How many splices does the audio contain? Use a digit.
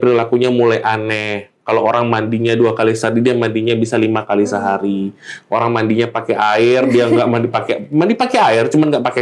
0